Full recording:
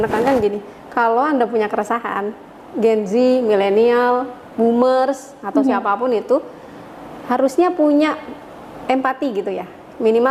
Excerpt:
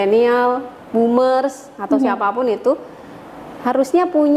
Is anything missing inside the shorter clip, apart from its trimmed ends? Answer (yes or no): no